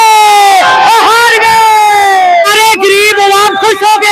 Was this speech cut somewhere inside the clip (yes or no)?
yes